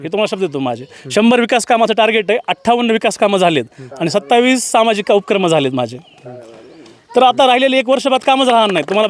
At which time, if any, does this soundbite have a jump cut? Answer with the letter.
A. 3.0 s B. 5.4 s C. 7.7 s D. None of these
D